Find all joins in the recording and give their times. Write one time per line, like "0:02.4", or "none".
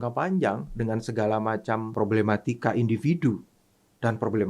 0:01.9

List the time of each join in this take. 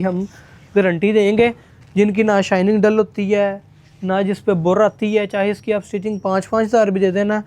0:01.7

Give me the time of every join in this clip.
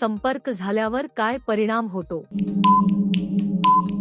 0:02.3

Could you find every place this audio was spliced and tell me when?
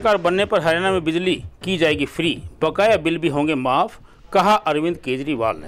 none

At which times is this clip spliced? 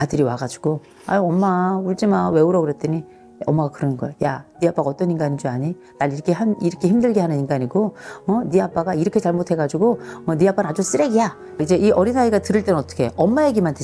0:11.4

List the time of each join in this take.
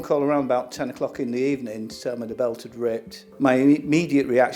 none

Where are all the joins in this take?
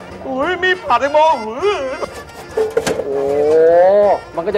0:01.9

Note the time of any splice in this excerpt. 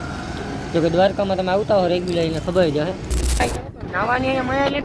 0:03.4

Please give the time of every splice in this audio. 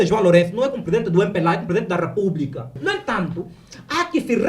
0:02.7

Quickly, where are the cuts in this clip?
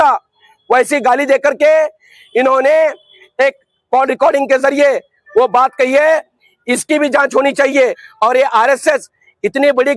0:08.0

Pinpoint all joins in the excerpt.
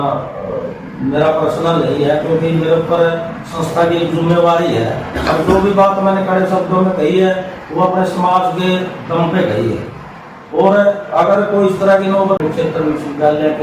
0:12.4

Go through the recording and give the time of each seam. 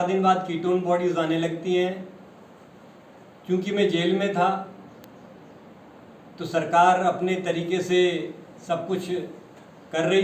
none

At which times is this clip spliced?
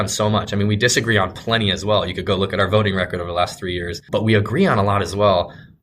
0:04.0

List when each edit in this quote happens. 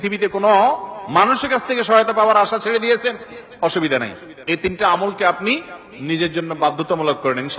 none

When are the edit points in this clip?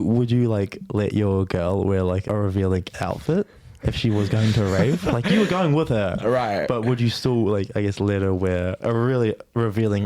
0:02.2
0:08.8

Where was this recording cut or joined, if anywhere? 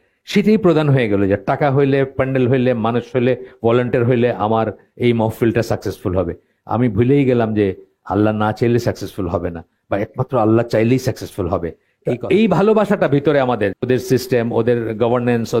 0:11.9
0:13.8

